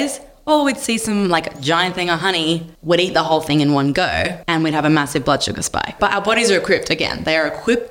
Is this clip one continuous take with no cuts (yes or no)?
no